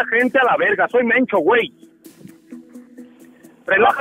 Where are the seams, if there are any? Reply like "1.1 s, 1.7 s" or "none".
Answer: 1.7 s, 3.2 s